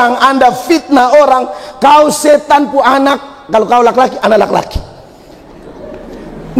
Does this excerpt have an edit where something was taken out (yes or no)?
no